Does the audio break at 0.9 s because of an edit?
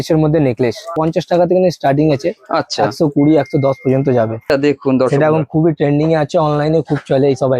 yes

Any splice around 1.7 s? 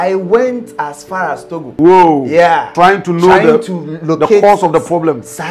yes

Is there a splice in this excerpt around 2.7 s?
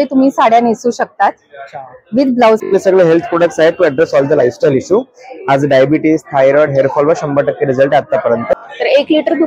yes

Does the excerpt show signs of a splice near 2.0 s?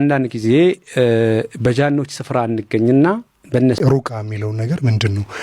no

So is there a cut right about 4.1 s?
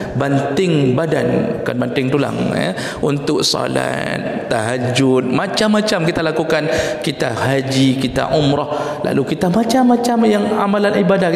no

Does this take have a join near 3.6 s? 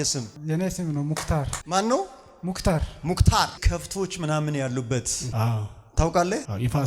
yes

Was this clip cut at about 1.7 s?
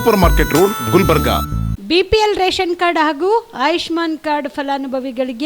yes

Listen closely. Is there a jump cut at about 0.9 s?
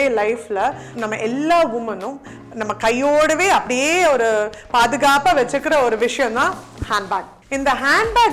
yes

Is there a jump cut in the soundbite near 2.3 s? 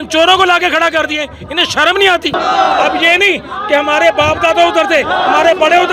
yes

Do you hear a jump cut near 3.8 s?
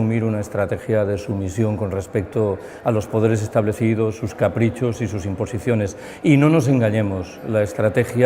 yes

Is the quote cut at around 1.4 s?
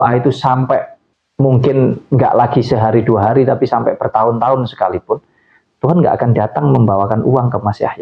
no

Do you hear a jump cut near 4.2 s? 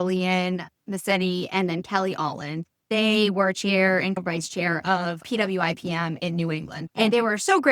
yes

